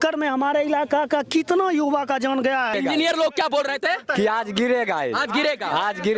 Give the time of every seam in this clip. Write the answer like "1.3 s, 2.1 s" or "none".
2.7 s